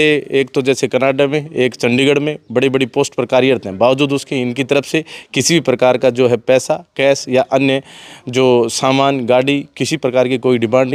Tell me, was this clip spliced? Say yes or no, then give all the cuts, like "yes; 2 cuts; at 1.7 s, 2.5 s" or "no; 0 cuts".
no; 0 cuts